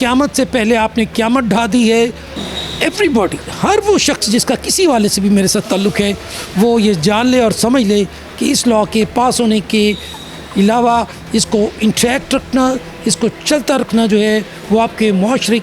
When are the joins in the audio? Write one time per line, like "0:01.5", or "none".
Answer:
none